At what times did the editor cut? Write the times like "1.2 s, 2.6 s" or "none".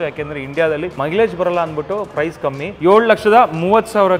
0.9 s, 2.7 s